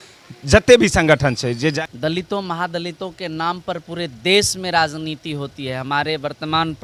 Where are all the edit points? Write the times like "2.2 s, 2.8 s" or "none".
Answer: 1.8 s